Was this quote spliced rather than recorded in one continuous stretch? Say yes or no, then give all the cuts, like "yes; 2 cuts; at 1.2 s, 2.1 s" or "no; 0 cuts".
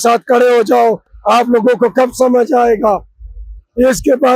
no; 0 cuts